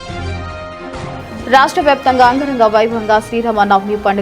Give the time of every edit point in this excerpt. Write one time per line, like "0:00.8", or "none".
none